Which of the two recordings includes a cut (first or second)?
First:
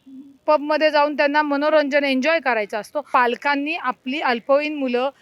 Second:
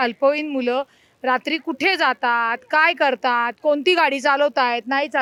first